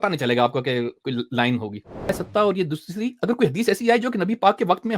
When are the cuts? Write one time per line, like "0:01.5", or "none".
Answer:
0:02.1